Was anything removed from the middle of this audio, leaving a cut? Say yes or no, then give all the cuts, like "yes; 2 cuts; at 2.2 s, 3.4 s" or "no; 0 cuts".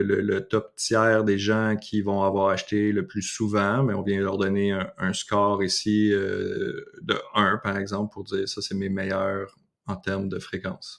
no; 0 cuts